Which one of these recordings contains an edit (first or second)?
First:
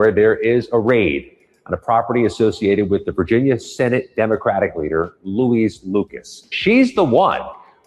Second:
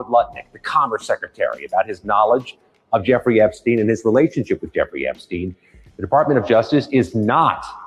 first